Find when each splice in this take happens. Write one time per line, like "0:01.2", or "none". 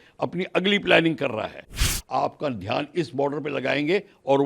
0:01.9